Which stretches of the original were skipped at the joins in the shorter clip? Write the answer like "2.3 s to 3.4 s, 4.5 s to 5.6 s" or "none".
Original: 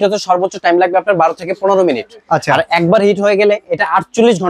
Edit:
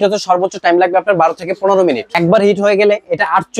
2.1 s to 2.7 s